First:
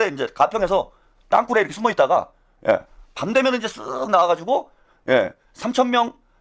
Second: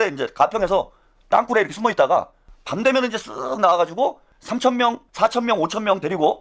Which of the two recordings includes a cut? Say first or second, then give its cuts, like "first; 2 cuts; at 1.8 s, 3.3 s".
second; 2 cuts; at 2.5 s, 4.6 s